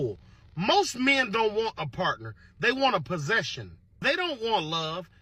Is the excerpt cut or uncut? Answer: uncut